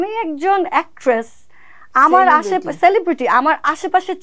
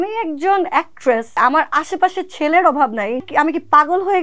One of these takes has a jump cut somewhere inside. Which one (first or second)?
second